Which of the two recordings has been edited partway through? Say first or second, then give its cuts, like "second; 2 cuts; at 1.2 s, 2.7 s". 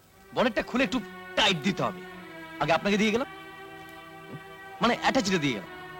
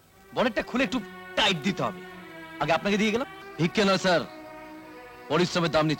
second; 1 cut; at 3.4 s